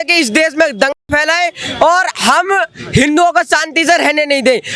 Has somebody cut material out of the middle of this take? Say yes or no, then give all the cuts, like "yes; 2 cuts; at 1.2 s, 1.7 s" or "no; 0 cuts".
no; 0 cuts